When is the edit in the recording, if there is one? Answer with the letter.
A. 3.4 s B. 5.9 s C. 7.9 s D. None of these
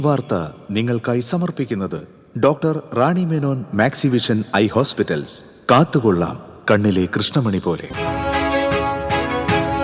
C